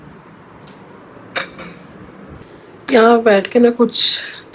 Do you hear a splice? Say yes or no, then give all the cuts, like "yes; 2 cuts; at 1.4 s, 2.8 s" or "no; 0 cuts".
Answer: no; 0 cuts